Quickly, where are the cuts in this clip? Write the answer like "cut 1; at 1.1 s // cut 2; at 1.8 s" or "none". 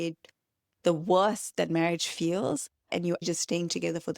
cut 1; at 3.0 s